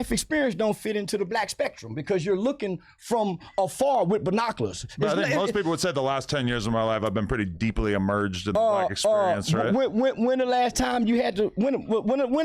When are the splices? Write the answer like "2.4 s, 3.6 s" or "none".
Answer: 9.8 s